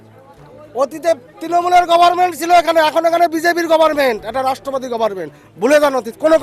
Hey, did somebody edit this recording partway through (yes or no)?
no